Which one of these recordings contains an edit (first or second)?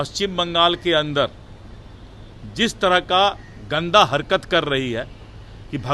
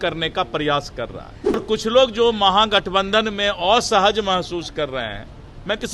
second